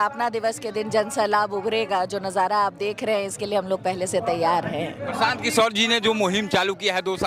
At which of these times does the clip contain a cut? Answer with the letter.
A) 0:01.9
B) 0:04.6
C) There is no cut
C